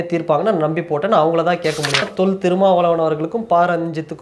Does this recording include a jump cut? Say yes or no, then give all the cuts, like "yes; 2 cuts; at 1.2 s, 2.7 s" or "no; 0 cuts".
yes; 1 cut; at 2.1 s